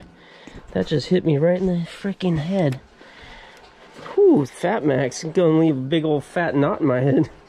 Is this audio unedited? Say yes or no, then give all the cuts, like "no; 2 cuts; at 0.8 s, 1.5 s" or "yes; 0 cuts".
yes; 0 cuts